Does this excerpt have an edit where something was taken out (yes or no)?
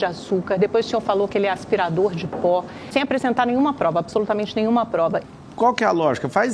yes